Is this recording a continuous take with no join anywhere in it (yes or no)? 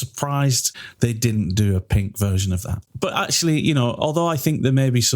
no